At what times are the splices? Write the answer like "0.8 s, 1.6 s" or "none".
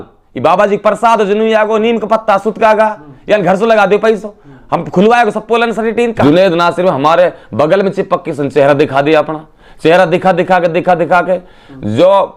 6.2 s